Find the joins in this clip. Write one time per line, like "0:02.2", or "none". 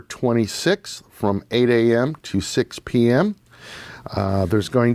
none